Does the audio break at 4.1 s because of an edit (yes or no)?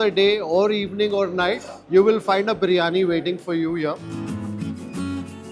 yes